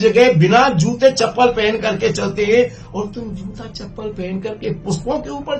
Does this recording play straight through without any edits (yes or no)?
yes